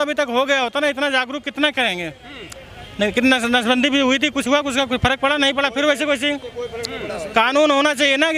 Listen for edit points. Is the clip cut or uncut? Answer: uncut